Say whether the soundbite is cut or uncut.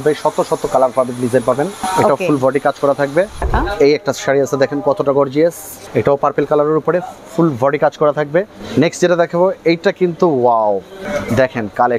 cut